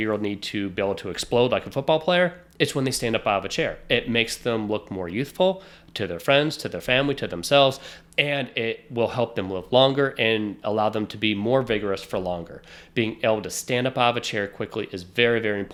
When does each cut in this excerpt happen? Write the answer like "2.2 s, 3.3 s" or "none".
none